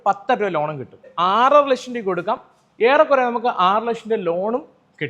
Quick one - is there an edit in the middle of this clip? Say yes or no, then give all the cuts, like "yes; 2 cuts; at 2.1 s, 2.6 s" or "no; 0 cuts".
yes; 1 cut; at 1.1 s